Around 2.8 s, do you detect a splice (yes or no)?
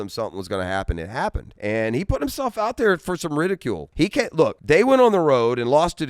no